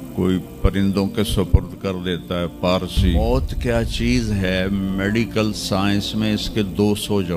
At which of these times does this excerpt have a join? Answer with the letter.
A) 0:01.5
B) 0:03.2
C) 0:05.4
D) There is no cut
B